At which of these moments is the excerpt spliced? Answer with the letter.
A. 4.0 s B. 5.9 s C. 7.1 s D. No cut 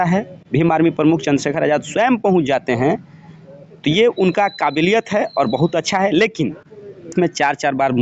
C